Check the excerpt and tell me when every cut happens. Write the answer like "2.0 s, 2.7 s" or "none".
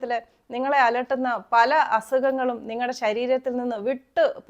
none